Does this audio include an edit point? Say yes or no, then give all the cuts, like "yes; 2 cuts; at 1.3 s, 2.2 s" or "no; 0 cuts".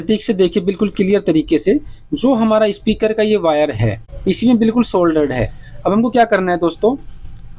no; 0 cuts